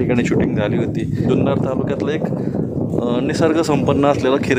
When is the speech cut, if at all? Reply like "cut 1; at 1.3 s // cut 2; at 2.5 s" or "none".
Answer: cut 1; at 1.2 s